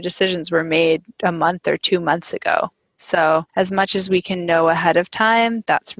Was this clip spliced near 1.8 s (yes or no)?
no